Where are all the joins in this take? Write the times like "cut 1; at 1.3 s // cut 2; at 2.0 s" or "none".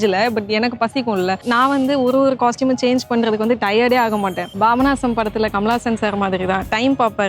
cut 1; at 1.4 s // cut 2; at 4.5 s